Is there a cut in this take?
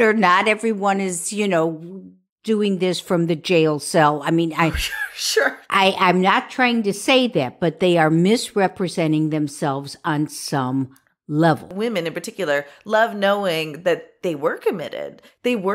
yes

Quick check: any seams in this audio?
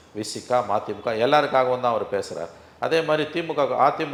no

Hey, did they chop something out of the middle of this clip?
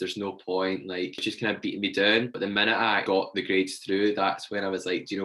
yes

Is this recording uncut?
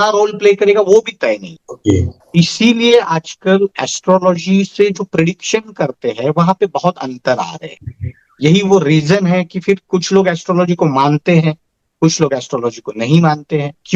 yes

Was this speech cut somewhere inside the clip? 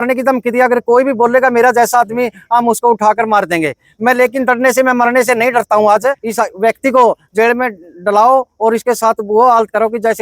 yes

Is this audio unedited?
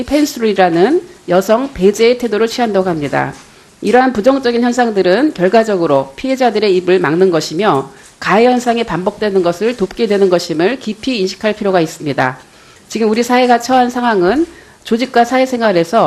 no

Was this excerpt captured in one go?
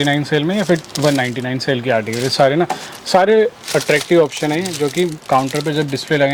yes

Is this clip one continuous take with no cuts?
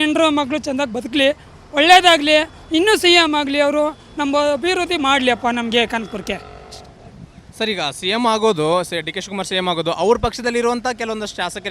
yes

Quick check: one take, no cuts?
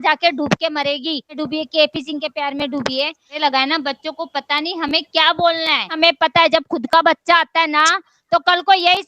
no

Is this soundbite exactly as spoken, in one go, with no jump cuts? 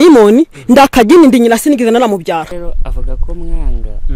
no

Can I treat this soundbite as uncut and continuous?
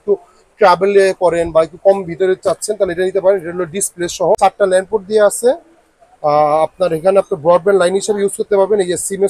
no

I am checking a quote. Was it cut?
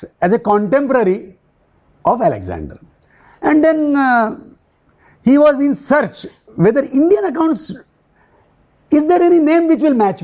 no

